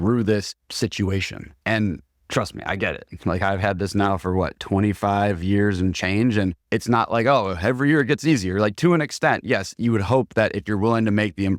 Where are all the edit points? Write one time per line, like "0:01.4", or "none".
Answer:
none